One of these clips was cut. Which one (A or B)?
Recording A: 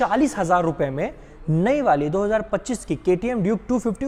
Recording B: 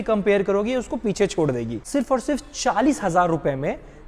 B